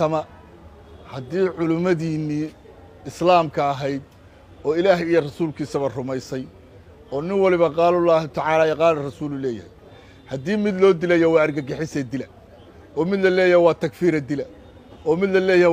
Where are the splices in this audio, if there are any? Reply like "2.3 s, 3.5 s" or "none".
none